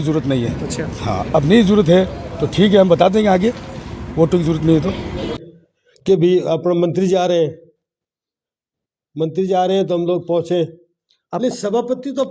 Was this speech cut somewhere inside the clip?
yes; 1 cut; at 5.3 s

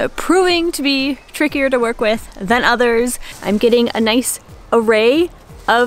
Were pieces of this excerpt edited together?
yes; 1 cut; at 3.3 s

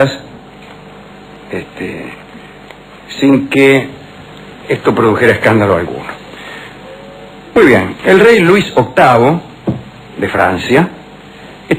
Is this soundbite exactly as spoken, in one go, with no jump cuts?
no; 1 cut; at 9.4 s

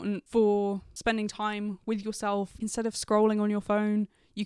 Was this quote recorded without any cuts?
no; 1 cut; at 2.6 s

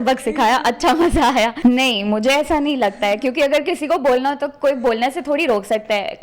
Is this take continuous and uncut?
no; 1 cut; at 1.5 s

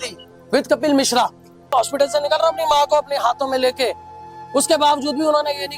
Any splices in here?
yes; 1 cut; at 1.7 s

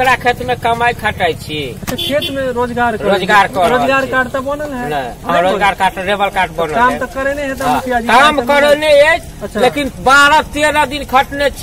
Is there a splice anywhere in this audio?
no; 0 cuts

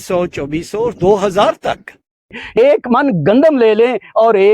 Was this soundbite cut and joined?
yes; 1 cut; at 2.6 s

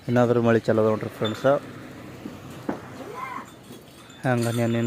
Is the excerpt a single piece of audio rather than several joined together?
yes; 0 cuts

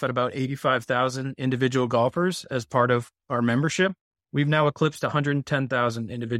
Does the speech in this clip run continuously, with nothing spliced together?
yes; 0 cuts

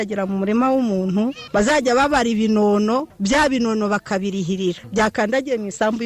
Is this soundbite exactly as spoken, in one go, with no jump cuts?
no; 3 cuts; at 1.4 s, 3.1 s, 4.8 s

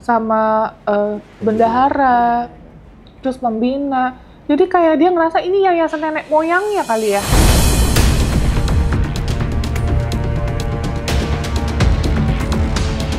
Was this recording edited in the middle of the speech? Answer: no; 0 cuts

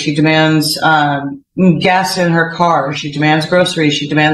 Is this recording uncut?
yes; 0 cuts

